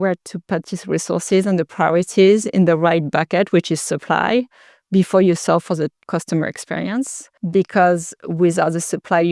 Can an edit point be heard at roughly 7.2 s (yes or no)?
yes